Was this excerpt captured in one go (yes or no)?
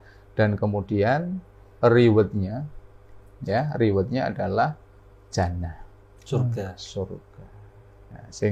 yes